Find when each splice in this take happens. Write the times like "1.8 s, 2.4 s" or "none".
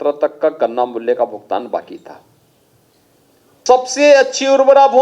3.7 s